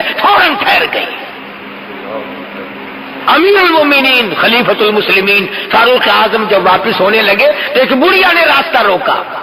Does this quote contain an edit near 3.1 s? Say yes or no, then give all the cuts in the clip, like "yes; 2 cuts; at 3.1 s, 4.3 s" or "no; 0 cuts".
yes; 1 cut; at 3.1 s